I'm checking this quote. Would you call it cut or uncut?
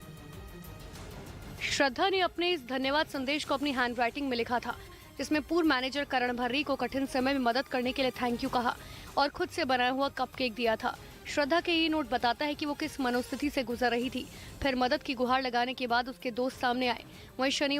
cut